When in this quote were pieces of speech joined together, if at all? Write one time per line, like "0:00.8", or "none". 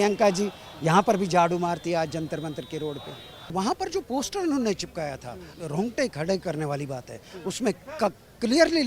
0:03.5